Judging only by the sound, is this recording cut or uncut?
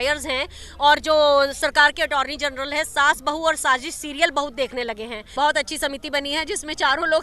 cut